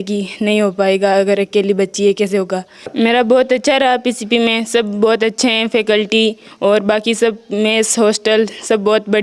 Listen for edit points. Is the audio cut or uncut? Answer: cut